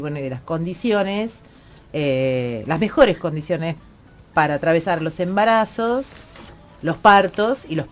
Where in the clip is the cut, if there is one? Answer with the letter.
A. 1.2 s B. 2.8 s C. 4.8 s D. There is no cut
C